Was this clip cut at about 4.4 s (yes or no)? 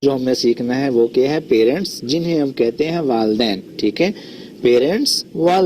no